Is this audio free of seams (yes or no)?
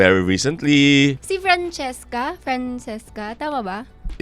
no